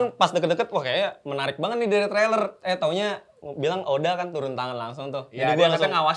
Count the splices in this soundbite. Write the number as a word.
zero